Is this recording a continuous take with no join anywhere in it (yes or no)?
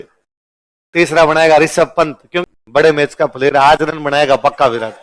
no